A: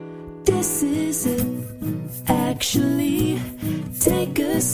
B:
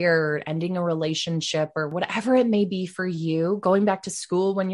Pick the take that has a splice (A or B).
B